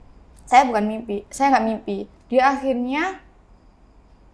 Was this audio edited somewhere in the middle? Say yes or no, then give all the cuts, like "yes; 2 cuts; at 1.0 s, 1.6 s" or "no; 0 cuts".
yes; 1 cut; at 2.1 s